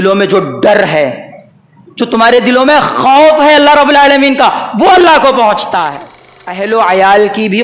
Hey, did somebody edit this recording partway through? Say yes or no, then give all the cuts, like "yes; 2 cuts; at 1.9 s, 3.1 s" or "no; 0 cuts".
yes; 1 cut; at 6.0 s